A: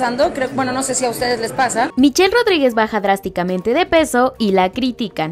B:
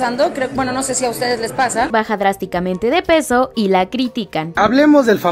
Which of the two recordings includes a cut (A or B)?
B